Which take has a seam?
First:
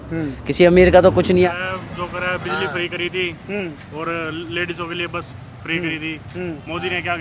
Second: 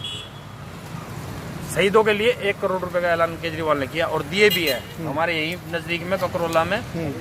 first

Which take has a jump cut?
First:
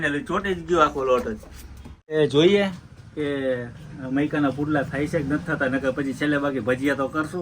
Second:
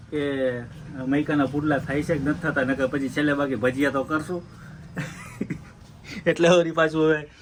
first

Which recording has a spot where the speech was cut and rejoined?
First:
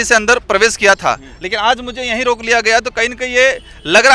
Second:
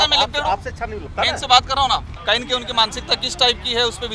second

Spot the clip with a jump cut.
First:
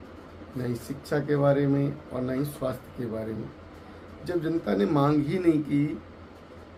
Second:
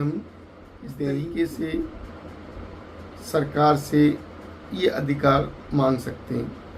second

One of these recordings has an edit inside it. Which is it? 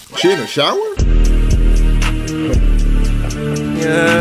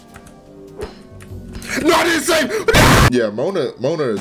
second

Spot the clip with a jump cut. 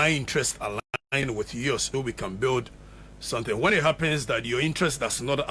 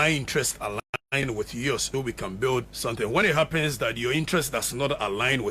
second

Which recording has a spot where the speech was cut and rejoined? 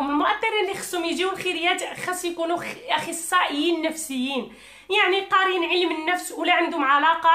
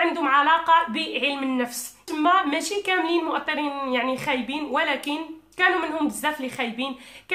second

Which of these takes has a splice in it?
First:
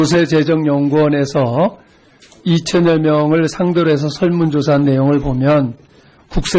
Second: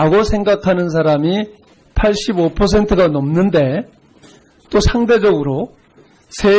second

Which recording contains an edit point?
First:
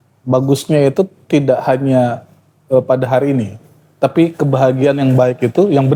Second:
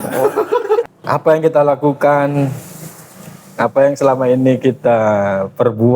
second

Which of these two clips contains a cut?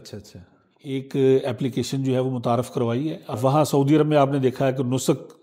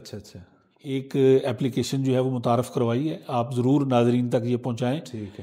first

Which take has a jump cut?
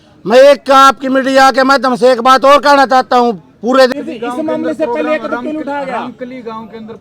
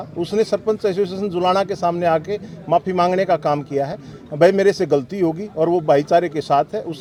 first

